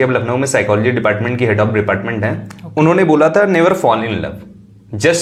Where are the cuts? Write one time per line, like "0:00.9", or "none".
none